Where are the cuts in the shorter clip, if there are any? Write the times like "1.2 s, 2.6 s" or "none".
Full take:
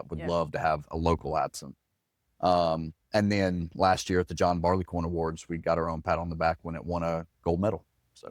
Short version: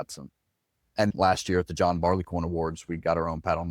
0.9 s